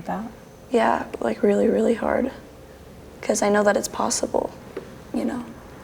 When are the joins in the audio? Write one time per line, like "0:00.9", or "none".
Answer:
none